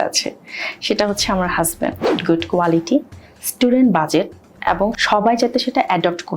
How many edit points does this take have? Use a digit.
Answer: 2